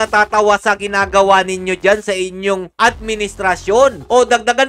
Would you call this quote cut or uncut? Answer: uncut